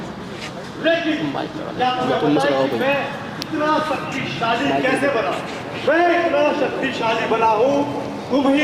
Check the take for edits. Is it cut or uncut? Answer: uncut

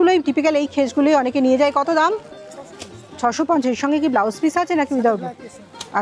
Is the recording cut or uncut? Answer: uncut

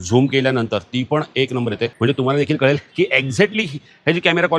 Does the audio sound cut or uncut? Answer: cut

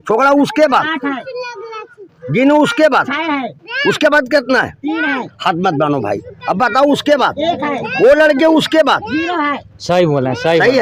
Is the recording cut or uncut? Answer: uncut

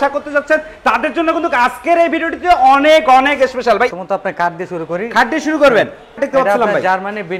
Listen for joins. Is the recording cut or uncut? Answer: cut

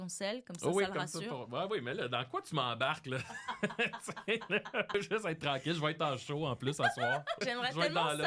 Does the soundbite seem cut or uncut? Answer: cut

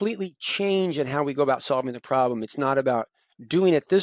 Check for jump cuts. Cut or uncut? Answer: uncut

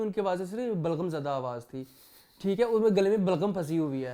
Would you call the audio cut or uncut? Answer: uncut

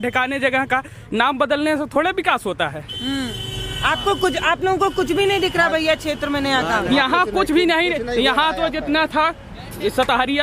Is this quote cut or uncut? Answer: uncut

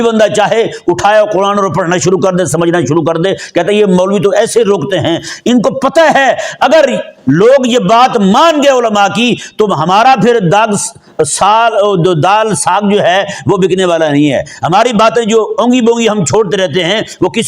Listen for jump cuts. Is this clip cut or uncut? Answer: uncut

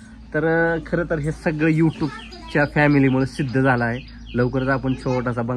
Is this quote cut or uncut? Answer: uncut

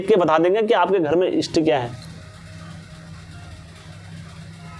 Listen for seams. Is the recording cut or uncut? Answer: uncut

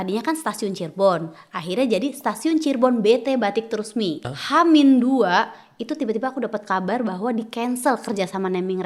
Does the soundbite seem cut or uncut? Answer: cut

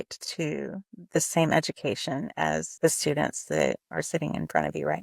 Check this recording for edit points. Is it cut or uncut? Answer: cut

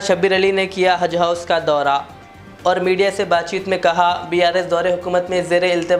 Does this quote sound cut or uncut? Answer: uncut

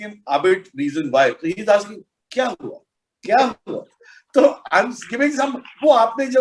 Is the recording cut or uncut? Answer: uncut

